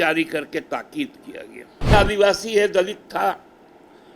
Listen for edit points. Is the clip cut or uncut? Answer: cut